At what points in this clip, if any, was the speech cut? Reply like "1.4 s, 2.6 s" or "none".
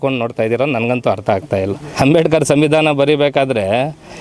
1.8 s